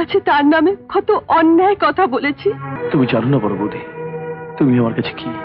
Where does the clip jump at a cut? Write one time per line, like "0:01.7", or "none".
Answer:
0:02.7